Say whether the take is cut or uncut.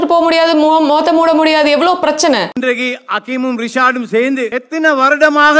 cut